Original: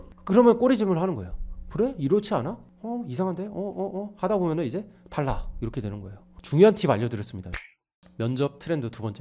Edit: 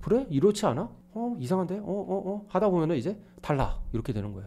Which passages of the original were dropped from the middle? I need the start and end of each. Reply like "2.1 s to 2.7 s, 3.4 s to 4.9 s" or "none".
none